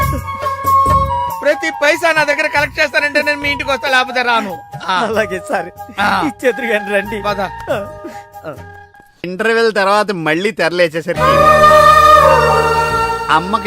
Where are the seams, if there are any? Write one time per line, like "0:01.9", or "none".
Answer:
0:09.2